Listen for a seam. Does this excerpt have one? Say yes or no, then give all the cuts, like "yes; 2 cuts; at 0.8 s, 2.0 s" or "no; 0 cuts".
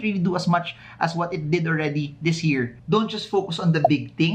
yes; 1 cut; at 2.8 s